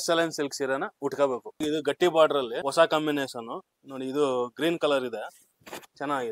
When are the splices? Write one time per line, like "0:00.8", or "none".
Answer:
0:01.5
0:02.6